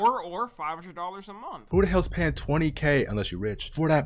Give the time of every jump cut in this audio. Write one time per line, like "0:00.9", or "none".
0:01.6